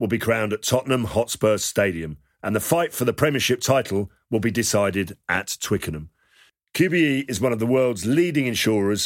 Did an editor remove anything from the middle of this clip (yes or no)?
no